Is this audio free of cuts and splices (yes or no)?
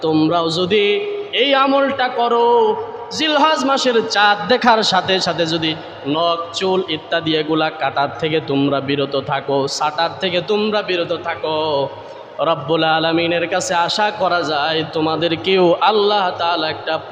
yes